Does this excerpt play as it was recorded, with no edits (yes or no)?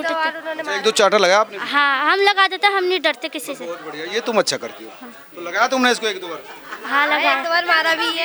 yes